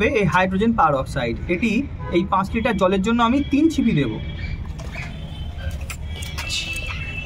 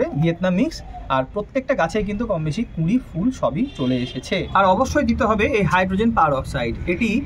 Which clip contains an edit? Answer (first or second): second